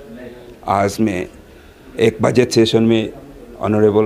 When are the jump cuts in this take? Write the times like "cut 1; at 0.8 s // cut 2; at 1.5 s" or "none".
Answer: none